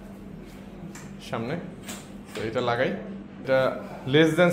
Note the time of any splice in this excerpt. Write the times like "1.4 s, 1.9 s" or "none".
3.4 s